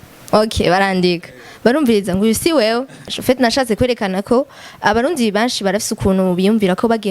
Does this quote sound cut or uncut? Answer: cut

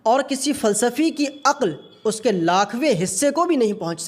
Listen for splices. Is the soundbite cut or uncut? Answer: uncut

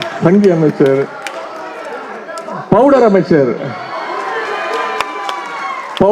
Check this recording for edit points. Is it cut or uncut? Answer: uncut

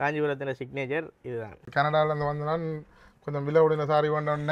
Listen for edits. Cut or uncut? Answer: cut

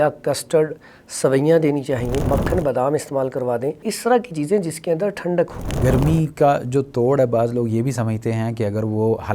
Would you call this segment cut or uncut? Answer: cut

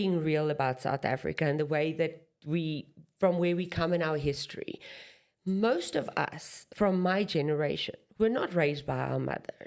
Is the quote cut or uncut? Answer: uncut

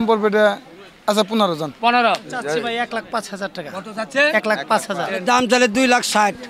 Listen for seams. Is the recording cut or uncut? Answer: cut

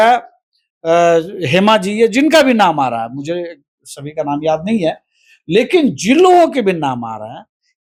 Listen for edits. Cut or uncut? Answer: uncut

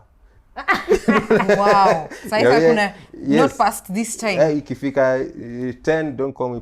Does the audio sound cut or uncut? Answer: uncut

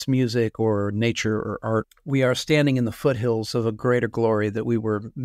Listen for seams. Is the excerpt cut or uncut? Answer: cut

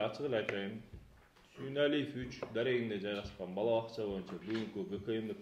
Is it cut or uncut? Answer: uncut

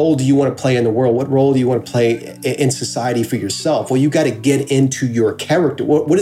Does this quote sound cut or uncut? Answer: uncut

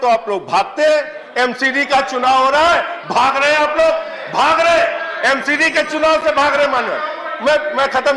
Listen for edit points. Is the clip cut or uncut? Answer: uncut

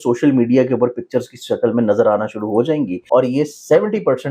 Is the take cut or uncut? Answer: cut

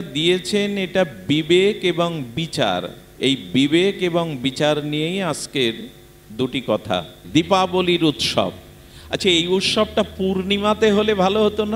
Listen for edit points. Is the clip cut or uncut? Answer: cut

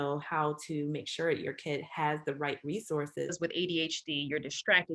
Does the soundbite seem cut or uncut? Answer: cut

